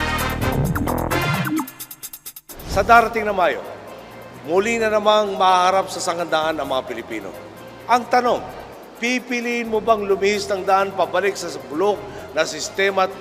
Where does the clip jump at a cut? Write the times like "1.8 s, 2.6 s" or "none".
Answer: 7.1 s